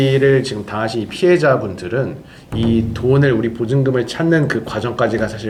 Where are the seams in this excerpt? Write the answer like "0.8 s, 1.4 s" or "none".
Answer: none